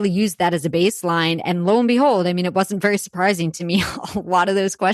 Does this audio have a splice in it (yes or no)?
no